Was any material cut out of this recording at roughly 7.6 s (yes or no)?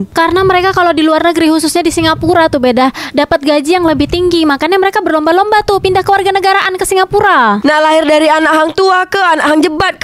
yes